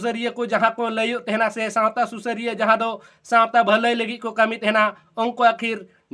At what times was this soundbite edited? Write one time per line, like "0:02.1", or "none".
none